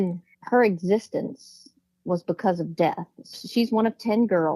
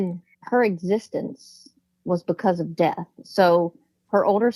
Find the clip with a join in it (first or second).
first